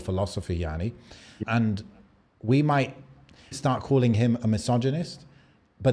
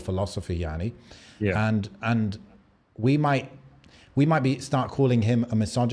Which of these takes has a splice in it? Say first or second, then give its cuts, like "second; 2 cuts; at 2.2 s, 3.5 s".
first; 2 cuts; at 1.4 s, 3.5 s